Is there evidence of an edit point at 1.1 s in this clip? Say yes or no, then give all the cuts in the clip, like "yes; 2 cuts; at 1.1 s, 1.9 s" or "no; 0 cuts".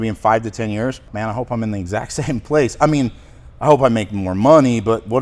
yes; 1 cut; at 1.1 s